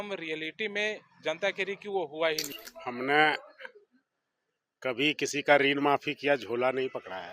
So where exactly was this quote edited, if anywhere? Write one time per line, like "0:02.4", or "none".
0:02.5